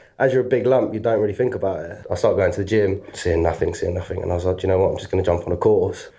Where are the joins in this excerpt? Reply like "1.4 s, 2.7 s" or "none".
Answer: 2.0 s